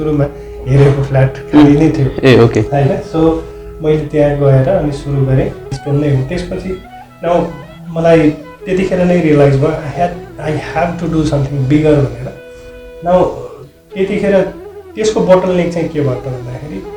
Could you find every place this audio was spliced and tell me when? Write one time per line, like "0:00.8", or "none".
0:05.8